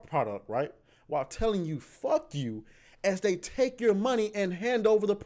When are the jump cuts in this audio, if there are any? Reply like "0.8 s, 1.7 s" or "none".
none

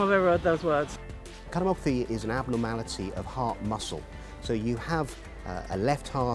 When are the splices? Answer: 1.0 s

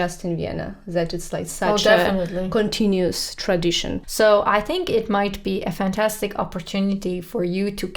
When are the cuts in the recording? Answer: 4.0 s

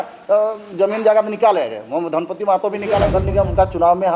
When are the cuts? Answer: 3.1 s

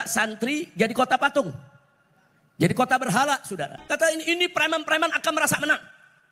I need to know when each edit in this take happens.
3.8 s

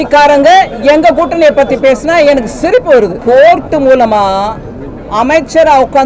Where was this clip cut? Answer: 3.2 s

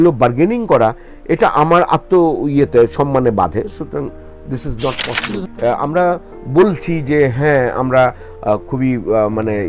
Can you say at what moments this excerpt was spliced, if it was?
5.4 s

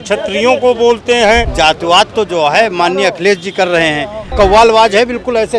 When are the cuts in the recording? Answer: 1.5 s, 4.3 s

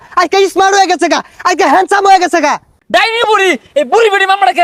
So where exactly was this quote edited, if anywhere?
2.8 s

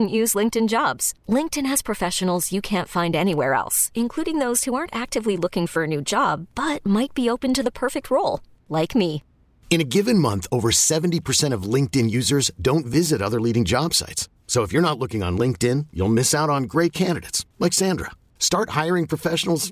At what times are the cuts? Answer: none

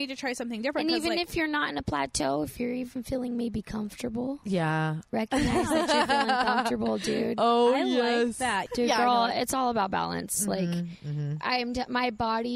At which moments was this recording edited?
8.6 s

